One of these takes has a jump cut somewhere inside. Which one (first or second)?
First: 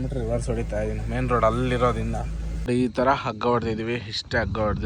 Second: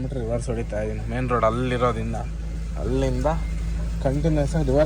first